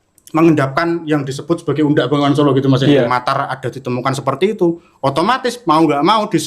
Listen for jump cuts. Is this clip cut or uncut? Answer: cut